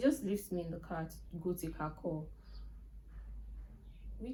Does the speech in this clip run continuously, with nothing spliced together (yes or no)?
yes